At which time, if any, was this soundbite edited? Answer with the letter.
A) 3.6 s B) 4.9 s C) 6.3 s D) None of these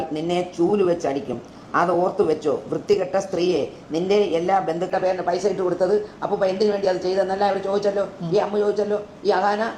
B